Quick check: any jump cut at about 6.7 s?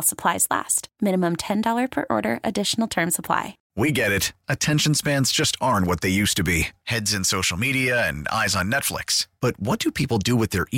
no; 1 cut; at 3.6 s

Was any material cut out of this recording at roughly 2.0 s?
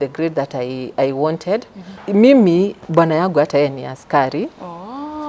yes; 1 cut; at 2.0 s

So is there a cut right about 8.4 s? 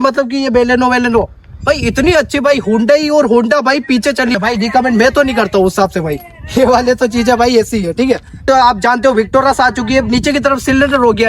yes; 2 cuts; at 4.4 s, 8.4 s

